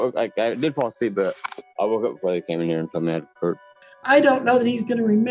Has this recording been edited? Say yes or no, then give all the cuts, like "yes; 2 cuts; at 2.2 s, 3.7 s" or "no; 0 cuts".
yes; 1 cut; at 3.8 s